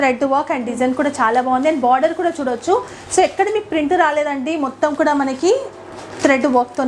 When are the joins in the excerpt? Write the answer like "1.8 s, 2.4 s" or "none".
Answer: none